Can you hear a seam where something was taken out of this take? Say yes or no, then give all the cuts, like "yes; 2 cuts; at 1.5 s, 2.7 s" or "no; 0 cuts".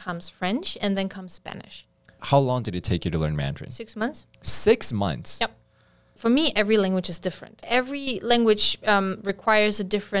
yes; 3 cuts; at 2.2 s, 6.1 s, 7.6 s